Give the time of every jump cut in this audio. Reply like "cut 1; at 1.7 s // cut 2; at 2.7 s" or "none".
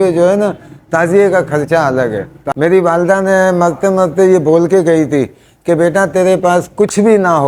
cut 1; at 2.4 s